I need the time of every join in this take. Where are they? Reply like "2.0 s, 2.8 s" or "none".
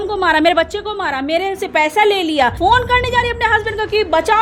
2.6 s